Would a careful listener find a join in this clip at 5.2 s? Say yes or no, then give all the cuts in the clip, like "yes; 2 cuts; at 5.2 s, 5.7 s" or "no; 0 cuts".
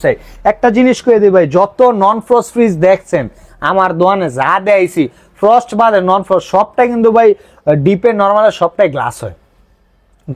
no; 0 cuts